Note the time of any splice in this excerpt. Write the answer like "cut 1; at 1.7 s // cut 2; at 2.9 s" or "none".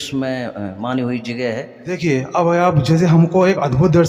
cut 1; at 1.8 s